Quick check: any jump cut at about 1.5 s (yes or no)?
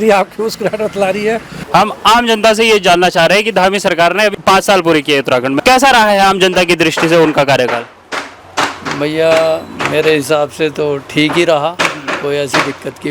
yes